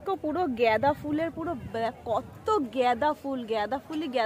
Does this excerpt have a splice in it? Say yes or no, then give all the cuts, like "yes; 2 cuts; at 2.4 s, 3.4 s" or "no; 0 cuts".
no; 0 cuts